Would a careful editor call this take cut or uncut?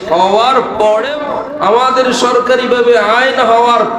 cut